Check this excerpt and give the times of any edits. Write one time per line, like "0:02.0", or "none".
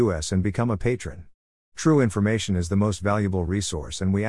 none